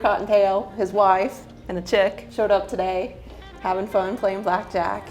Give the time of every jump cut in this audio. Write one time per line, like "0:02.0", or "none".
0:02.2